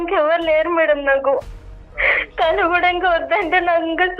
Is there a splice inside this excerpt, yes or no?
yes